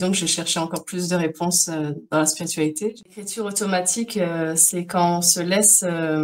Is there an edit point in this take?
yes; 1 cut; at 3.2 s

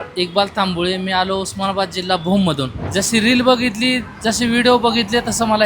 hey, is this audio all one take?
no; 1 cut; at 2.8 s

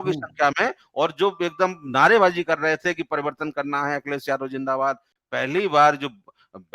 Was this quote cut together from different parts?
yes; 1 cut; at 5.1 s

